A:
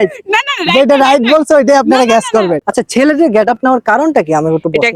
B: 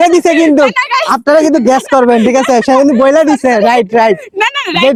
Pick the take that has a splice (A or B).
A